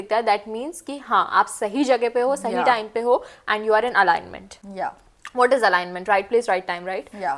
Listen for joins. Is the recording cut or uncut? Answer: uncut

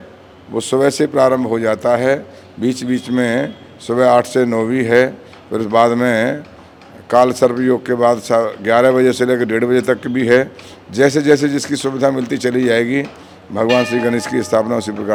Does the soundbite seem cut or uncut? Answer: uncut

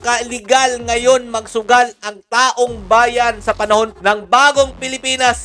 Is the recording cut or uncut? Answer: uncut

